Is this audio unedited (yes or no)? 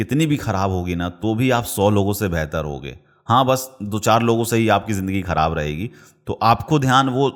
yes